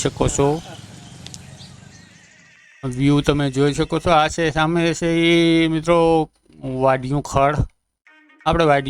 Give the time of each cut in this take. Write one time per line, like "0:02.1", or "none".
0:02.2